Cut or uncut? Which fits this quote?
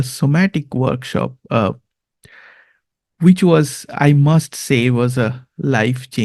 uncut